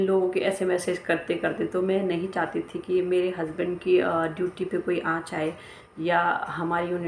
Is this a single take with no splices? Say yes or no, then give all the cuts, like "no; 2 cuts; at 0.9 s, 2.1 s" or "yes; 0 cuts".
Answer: yes; 0 cuts